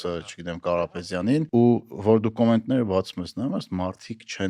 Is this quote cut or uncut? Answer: cut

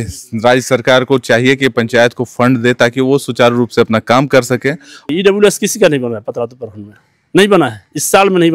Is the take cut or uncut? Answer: cut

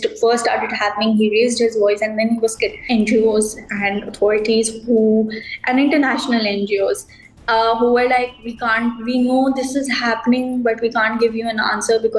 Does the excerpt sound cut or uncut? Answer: cut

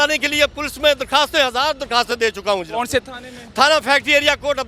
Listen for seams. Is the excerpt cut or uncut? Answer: uncut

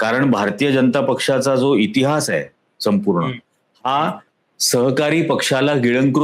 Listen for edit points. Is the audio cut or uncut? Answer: uncut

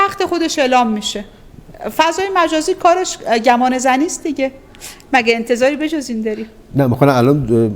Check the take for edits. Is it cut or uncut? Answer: uncut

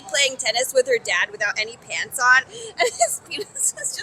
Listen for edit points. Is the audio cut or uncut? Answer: cut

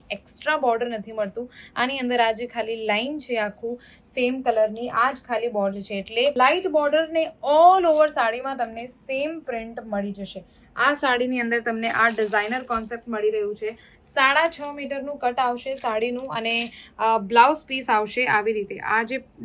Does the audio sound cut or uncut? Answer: uncut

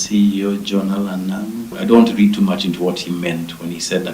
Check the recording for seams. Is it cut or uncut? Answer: cut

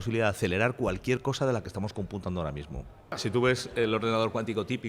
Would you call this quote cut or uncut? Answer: cut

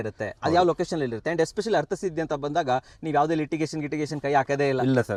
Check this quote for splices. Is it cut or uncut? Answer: uncut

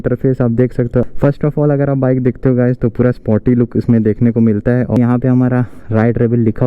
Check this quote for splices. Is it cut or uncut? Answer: cut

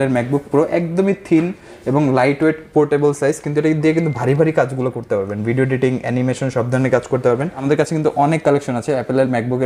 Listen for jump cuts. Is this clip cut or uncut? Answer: cut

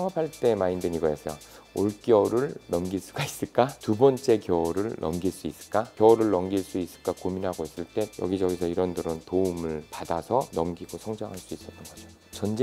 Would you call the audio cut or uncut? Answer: uncut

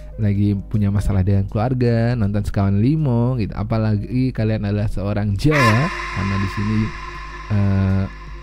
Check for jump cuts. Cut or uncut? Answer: uncut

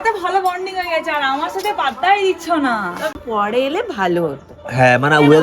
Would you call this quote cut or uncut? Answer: cut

